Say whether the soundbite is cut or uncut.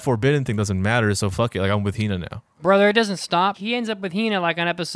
cut